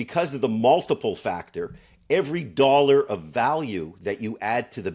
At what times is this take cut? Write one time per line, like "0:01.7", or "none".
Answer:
none